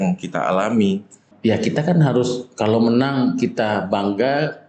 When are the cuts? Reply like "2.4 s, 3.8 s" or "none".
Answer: 1.3 s